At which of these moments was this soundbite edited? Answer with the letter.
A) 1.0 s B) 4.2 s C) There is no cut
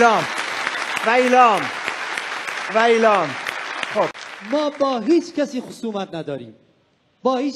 B